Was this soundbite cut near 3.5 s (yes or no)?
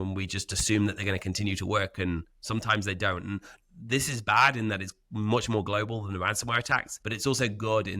yes